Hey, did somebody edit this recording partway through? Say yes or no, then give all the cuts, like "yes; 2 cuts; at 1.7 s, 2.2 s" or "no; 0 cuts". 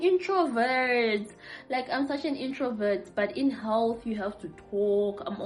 no; 0 cuts